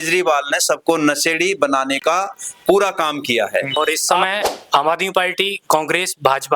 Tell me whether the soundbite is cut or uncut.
cut